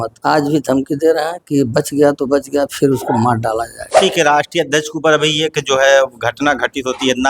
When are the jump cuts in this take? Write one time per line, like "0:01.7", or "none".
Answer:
0:04.0